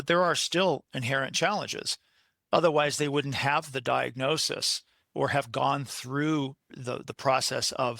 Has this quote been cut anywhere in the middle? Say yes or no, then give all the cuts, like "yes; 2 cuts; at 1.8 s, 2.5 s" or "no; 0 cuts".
yes; 1 cut; at 6.7 s